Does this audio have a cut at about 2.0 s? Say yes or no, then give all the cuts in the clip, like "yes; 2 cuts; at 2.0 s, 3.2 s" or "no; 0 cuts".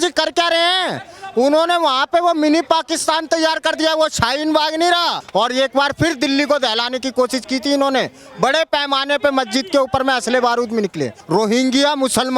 no; 2 cuts; at 5.2 s, 11.2 s